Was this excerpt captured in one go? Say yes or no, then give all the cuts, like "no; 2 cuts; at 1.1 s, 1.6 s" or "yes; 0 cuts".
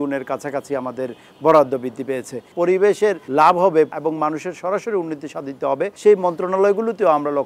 no; 4 cuts; at 2.5 s, 3.2 s, 3.9 s, 5.9 s